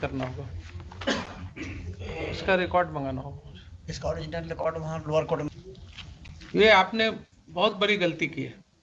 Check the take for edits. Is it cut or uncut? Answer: cut